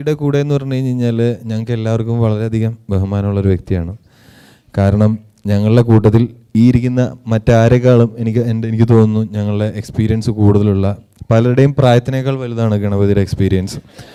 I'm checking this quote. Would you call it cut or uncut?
uncut